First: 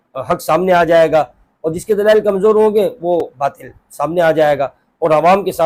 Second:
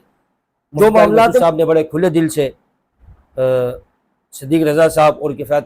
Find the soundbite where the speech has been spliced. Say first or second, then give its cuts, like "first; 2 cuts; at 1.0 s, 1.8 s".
second; 1 cut; at 1.4 s